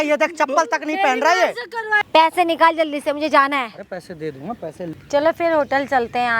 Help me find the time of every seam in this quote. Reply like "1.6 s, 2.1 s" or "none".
2.0 s, 4.8 s